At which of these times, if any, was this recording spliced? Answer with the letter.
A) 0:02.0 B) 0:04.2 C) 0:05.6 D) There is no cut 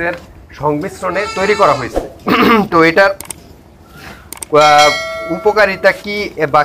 D